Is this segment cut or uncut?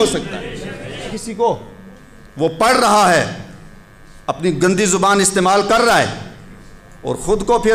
cut